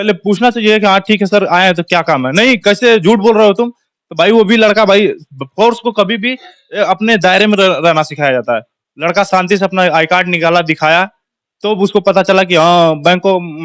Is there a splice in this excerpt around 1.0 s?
no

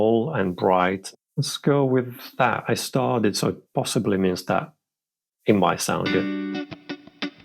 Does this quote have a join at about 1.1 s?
yes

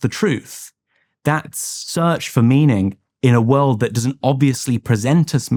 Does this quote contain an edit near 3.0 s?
no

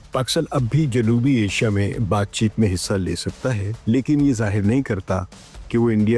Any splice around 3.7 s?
yes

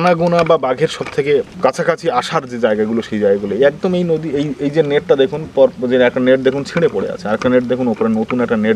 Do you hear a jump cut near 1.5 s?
no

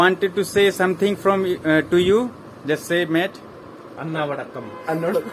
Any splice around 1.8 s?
no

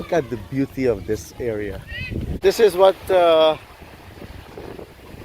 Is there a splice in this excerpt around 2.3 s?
yes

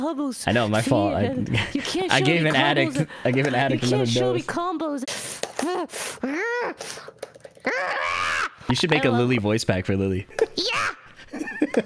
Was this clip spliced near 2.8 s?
no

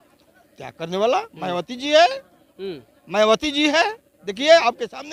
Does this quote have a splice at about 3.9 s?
no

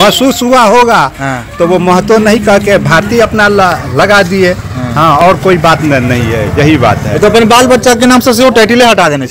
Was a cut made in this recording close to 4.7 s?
no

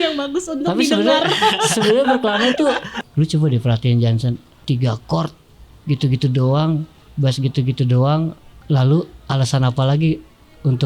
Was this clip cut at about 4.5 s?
yes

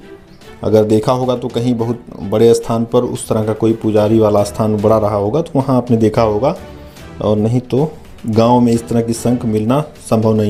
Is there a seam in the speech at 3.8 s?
no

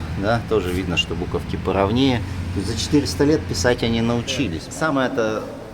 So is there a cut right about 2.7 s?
no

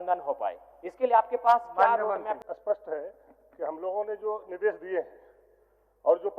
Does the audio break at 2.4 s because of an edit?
yes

